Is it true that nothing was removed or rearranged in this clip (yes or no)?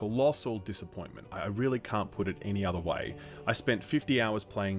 yes